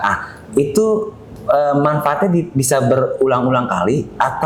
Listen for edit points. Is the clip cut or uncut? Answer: uncut